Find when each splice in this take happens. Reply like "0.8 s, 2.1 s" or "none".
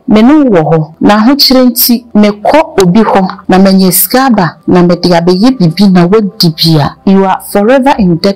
0.9 s, 2.1 s, 3.4 s, 4.6 s, 6.9 s